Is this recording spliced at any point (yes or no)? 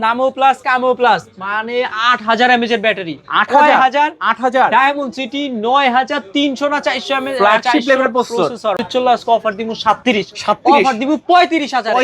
yes